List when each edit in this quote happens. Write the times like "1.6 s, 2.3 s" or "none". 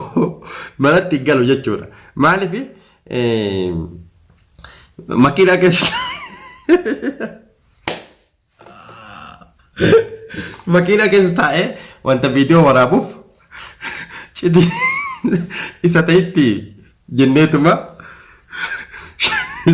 none